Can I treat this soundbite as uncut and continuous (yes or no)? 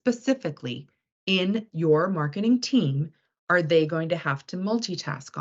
yes